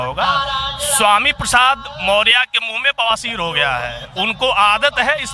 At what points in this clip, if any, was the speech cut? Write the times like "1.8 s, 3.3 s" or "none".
none